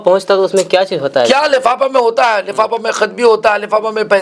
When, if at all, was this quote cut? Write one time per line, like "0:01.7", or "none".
none